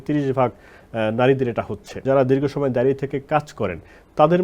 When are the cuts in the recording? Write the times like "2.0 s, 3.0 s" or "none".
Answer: 1.9 s